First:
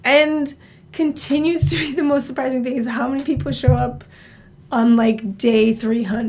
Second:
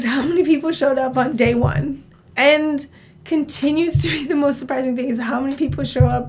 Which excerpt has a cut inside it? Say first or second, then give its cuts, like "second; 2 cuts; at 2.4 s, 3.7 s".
second; 1 cut; at 1.3 s